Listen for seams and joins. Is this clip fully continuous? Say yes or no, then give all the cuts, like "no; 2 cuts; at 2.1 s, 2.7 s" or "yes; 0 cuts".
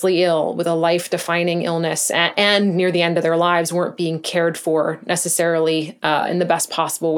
yes; 0 cuts